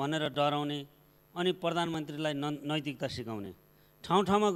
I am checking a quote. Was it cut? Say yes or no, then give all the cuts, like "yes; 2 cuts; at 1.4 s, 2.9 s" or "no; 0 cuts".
no; 0 cuts